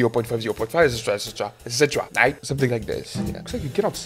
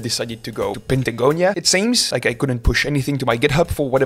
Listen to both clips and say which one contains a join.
second; 2 cuts; at 0.8 s, 1.8 s

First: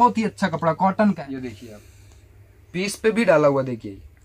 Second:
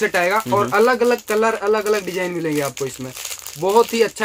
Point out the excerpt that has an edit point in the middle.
first; 1 cut; at 1.2 s

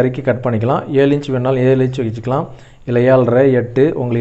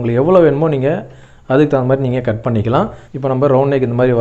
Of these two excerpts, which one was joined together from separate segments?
second; 1 cut; at 3.0 s

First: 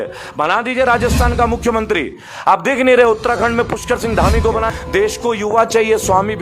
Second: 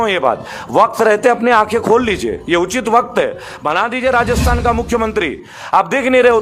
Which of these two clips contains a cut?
first; 1 cut; at 4.7 s

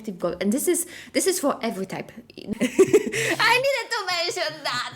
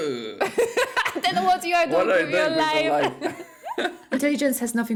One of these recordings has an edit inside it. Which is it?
first; 1 cut; at 2.5 s

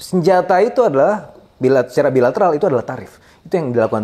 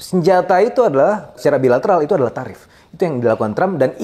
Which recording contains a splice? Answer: second; 1 cut; at 1.4 s

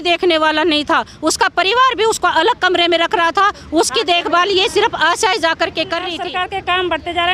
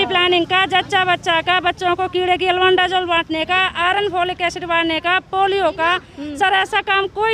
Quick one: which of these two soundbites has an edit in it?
first; 1 cut; at 6.2 s

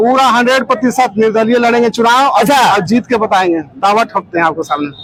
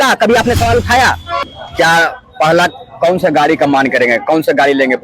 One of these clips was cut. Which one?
second; 1 cut; at 1.3 s

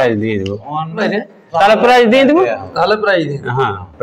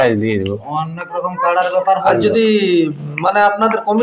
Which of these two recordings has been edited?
first; 1 cut; at 1.0 s

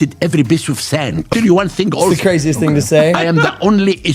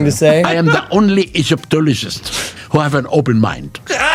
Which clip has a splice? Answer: first; 1 cut; at 1.3 s

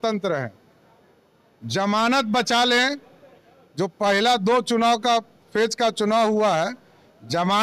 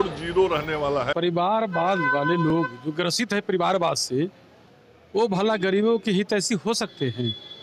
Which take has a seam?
second; 1 cut; at 1.1 s

